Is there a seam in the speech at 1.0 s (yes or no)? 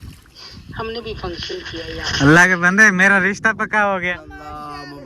no